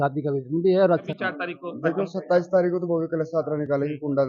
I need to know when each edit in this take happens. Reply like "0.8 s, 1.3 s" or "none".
1.1 s